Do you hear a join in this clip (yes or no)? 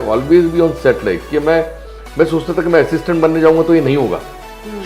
no